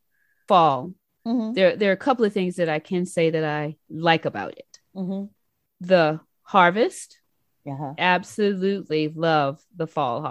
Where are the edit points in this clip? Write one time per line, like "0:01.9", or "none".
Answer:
none